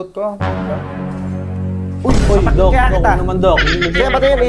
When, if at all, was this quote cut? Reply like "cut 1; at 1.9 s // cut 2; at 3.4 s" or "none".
none